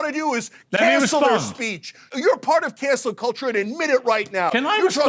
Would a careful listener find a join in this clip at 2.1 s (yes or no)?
yes